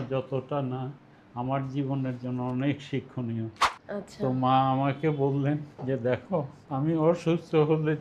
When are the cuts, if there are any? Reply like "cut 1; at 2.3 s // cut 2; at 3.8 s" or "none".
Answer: cut 1; at 3.8 s // cut 2; at 5.7 s // cut 3; at 6.6 s